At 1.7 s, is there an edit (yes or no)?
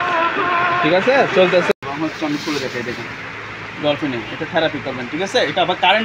yes